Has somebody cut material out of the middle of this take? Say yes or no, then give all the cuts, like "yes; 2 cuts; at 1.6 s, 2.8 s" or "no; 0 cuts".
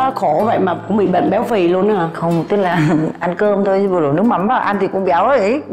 no; 0 cuts